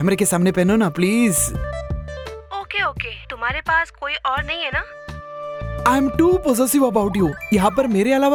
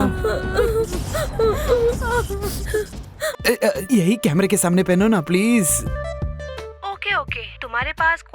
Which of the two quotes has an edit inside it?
second; 1 cut; at 3.4 s

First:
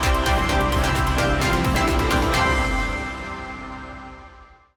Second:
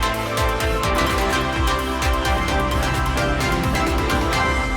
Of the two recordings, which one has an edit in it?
second; 1 cut; at 1.0 s

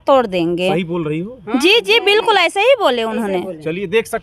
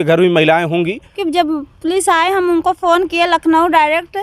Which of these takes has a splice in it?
second; 1 cut; at 1.2 s

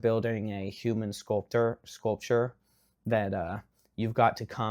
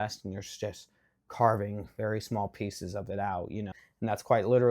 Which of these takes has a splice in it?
second; 1 cut; at 3.8 s

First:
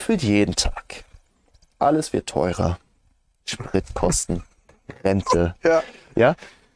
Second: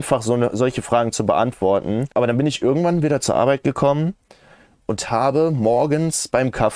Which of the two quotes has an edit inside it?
second; 1 cut; at 2.1 s

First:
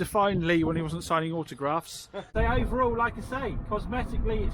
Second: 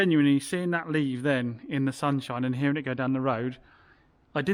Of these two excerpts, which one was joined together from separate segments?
first; 1 cut; at 2.3 s

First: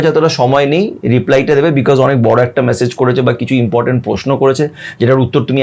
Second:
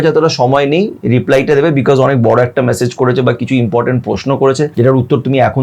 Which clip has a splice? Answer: second; 1 cut; at 4.7 s

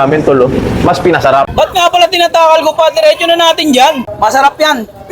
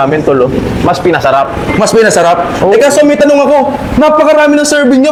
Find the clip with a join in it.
first; 2 cuts; at 1.5 s, 4.0 s

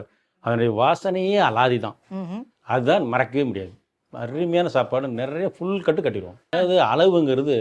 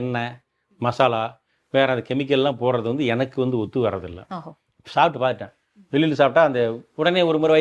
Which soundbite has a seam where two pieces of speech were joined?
first; 1 cut; at 6.3 s

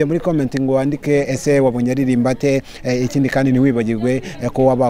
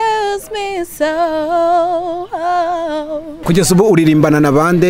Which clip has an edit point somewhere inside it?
second; 1 cut; at 3.4 s

